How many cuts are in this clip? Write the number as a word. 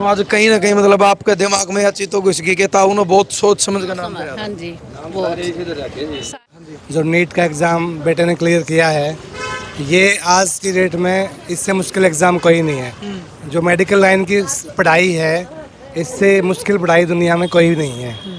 one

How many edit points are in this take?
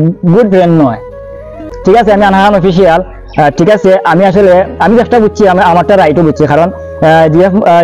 one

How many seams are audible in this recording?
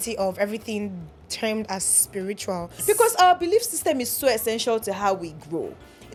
zero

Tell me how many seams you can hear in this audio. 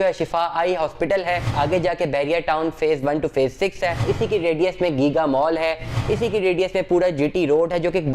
two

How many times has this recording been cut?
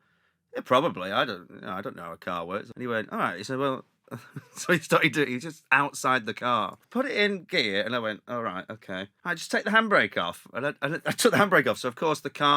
three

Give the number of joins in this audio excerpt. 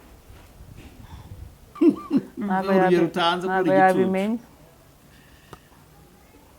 one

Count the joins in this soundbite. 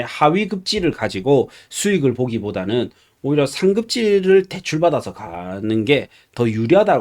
zero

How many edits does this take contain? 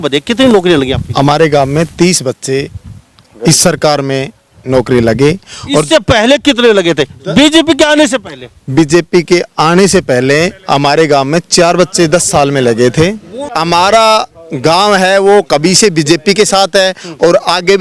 one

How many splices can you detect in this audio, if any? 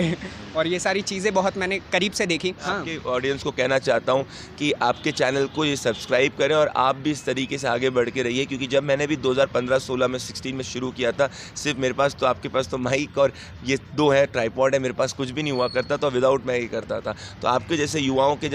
one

